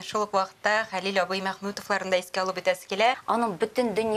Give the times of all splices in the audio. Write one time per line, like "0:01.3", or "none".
0:03.2